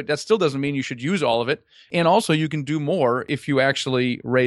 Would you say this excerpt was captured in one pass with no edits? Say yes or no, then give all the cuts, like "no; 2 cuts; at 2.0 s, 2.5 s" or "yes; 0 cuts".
no; 1 cut; at 3.3 s